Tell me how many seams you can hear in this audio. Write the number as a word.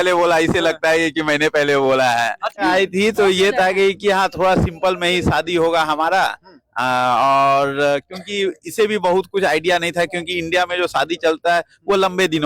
one